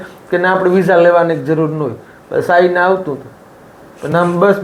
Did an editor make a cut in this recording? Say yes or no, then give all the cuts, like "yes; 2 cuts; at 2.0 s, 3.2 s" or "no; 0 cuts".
no; 0 cuts